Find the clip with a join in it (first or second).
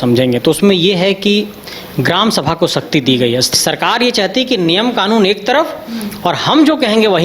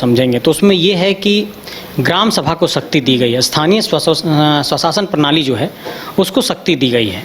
first